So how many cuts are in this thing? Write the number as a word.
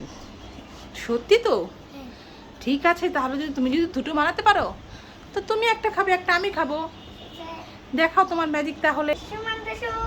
one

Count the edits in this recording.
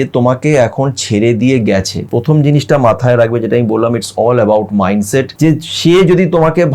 two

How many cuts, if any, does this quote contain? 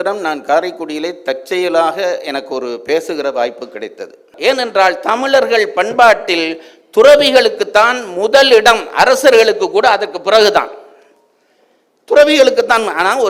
one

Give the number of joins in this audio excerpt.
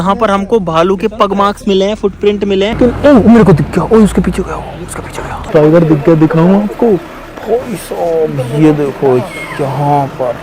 two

